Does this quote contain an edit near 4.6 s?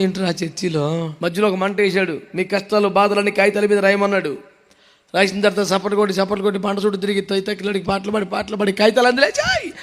no; 1 cut; at 1.1 s

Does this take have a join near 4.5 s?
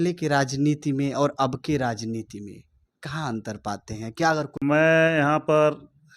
yes; 1 cut; at 4.5 s

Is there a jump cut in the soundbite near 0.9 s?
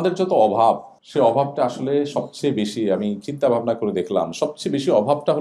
yes; 1 cut; at 0.9 s

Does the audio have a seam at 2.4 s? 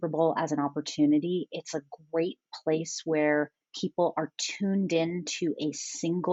no; 0 cuts

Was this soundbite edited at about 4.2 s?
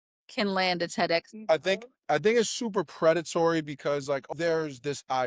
yes; 2 cuts; at 1.4 s, 4.2 s

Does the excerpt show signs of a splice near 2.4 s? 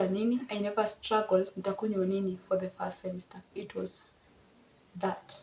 no; 0 cuts

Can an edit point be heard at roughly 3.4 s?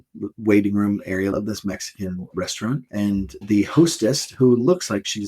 yes; 2 cuts; at 1.3 s, 3.4 s

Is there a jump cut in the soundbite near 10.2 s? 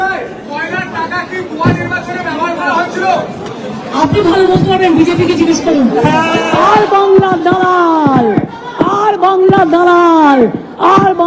no; 0 cuts

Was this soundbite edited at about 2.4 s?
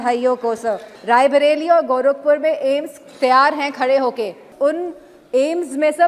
no; 2 cuts; at 0.9 s, 4.5 s

